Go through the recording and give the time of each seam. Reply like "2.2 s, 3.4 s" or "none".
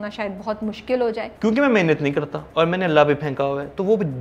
1.3 s, 2.4 s